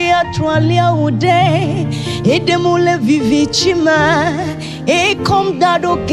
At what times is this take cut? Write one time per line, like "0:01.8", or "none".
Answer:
none